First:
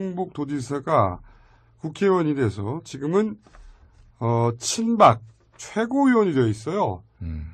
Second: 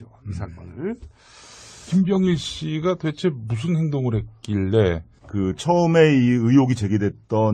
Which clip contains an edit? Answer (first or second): first